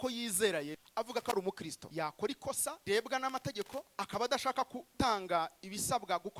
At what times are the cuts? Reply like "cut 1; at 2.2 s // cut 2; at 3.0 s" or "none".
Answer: cut 1; at 0.8 s // cut 2; at 1.7 s // cut 3; at 2.8 s // cut 4; at 3.9 s // cut 5; at 4.9 s